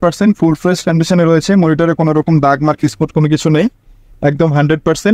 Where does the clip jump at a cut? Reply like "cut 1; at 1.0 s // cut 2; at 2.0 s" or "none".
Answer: none